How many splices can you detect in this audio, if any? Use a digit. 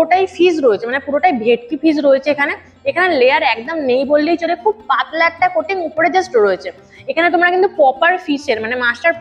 0